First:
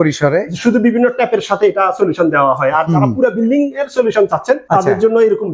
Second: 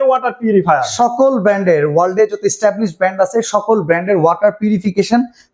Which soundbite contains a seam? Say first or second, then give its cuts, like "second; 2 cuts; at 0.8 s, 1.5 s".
first; 1 cut; at 4.6 s